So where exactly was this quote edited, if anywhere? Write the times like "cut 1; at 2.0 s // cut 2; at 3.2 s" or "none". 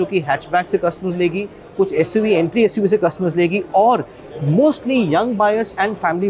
none